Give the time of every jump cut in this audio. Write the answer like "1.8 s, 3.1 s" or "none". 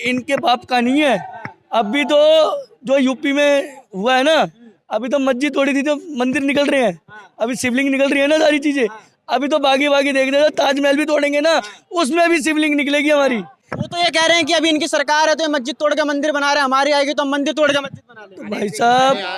none